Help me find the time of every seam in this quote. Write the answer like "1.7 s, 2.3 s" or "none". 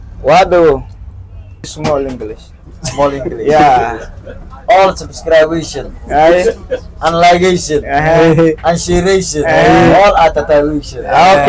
1.7 s